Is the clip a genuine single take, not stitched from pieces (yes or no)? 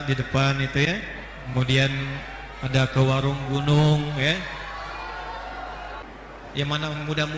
no